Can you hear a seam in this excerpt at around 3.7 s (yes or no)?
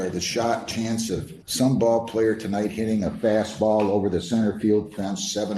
no